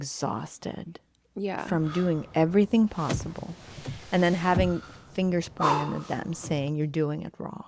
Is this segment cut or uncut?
uncut